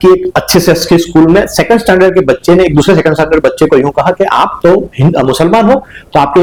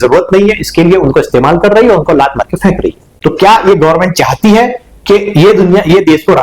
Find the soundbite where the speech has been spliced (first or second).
second